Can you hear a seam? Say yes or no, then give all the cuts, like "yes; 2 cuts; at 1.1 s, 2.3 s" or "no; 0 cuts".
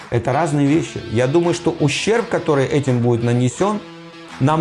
yes; 1 cut; at 1.1 s